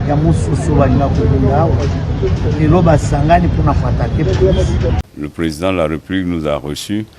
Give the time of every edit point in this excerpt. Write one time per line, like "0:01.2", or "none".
0:05.0

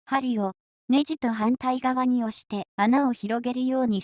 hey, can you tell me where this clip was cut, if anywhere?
none

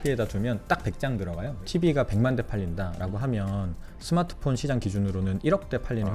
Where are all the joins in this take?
0:01.6

